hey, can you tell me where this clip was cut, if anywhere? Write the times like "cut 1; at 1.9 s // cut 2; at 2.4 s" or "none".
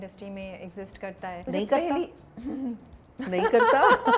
cut 1; at 1.5 s // cut 2; at 2.7 s